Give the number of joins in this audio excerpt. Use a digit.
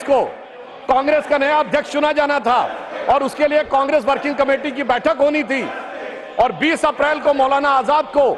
0